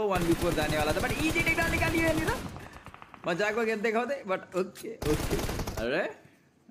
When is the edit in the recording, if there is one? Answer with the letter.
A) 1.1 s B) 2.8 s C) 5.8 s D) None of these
C